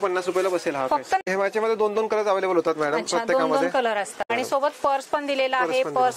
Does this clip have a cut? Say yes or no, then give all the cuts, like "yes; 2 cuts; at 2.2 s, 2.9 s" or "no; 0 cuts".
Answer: yes; 2 cuts; at 1.2 s, 4.3 s